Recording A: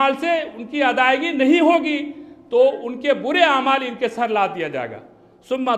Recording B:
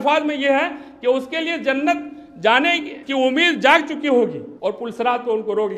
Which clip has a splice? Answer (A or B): B